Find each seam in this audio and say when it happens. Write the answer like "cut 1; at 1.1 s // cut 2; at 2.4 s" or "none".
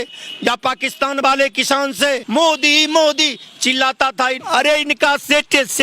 cut 1; at 2.2 s // cut 2; at 4.4 s